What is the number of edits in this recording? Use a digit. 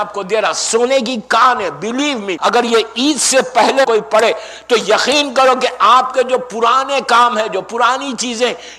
2